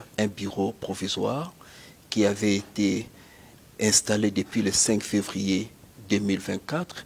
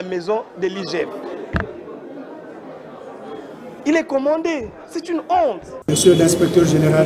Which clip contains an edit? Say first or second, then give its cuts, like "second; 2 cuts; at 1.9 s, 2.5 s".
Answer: second; 1 cut; at 5.7 s